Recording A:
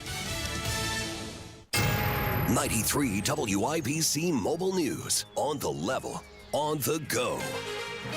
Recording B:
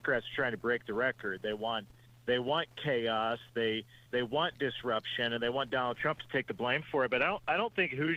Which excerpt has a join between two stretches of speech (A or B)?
A